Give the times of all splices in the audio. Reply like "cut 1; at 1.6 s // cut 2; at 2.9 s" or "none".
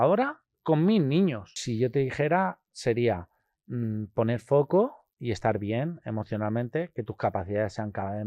cut 1; at 1.6 s